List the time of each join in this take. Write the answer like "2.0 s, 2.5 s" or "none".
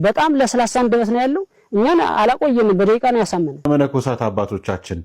3.7 s